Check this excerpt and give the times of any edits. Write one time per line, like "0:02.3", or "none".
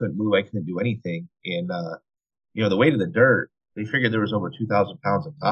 none